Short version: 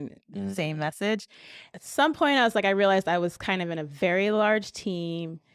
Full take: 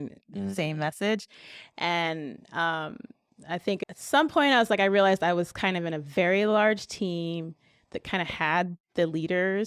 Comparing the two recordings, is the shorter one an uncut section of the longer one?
no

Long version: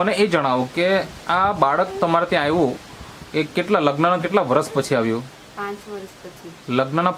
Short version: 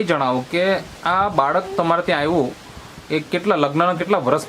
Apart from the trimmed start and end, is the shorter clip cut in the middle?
no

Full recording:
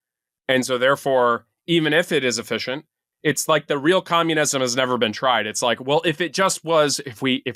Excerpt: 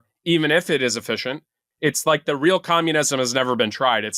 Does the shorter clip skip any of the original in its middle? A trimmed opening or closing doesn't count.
no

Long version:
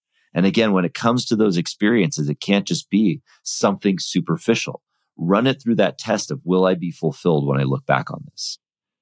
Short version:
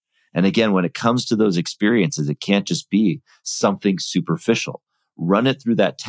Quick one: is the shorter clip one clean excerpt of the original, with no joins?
yes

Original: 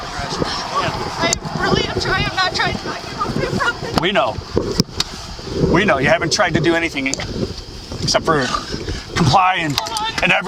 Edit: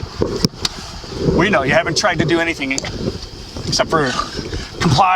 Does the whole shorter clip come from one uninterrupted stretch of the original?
yes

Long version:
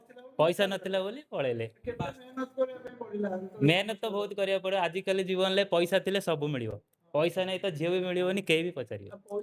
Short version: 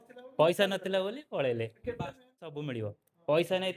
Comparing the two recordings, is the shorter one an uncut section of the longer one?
no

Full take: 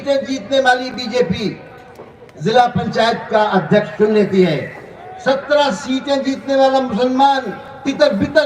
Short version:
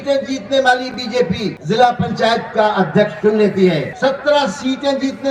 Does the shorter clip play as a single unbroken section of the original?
no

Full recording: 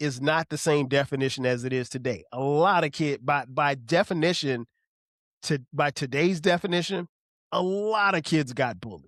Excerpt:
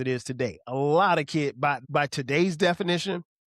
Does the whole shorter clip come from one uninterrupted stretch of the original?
no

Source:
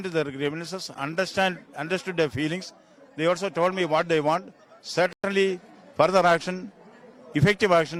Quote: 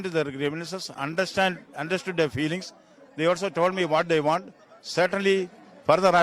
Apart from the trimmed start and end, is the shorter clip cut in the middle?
yes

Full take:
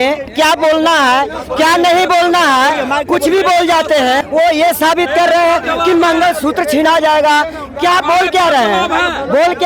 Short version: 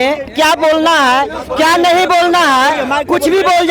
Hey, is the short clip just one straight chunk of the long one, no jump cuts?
yes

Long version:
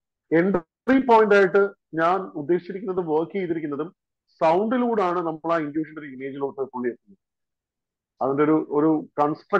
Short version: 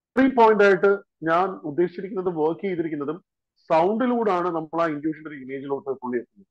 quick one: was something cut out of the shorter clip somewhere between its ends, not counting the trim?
no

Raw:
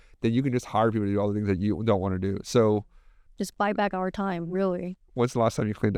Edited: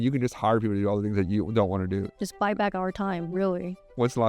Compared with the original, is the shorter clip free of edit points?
no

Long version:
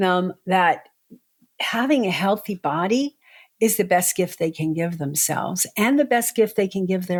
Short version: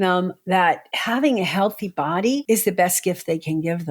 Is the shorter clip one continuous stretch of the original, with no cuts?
no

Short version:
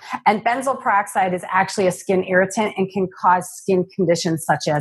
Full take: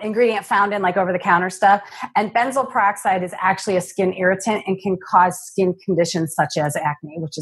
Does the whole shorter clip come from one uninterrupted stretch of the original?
yes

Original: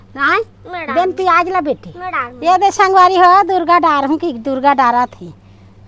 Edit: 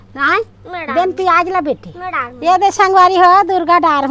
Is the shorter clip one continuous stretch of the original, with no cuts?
yes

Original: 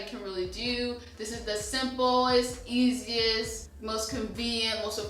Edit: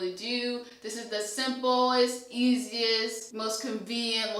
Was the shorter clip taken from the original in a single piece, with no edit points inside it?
no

